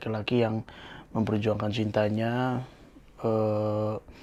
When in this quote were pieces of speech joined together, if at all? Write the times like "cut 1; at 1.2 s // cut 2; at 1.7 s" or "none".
none